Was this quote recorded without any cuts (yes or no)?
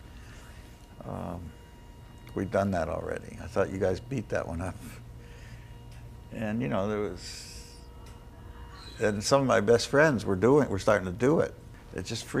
yes